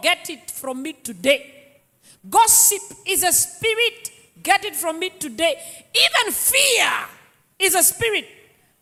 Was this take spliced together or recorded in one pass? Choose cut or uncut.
uncut